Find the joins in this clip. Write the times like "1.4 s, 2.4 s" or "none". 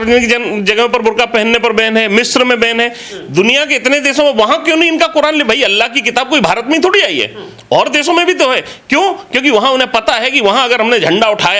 none